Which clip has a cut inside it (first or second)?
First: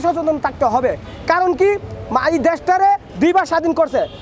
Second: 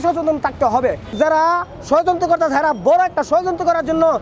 second